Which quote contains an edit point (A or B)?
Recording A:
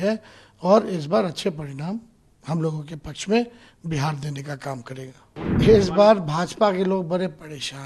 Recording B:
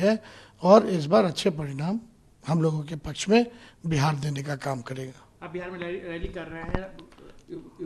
A